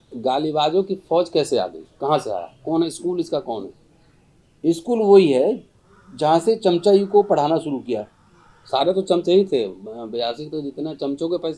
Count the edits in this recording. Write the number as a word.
zero